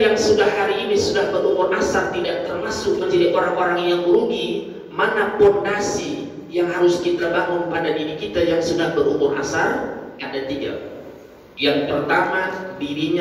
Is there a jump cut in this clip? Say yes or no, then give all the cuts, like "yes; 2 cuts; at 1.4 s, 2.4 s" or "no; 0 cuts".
no; 0 cuts